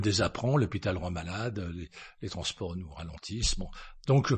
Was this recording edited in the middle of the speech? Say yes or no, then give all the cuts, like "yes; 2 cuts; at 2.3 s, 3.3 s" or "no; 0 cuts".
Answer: no; 0 cuts